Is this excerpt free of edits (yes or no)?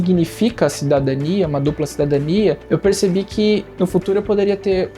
yes